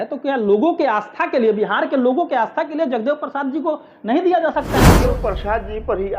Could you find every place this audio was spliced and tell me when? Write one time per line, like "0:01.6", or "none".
0:05.1